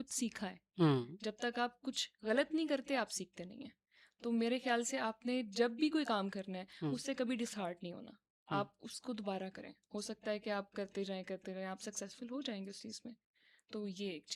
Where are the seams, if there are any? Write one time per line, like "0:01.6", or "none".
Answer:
none